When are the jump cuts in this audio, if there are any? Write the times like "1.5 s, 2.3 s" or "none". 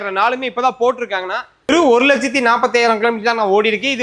1.7 s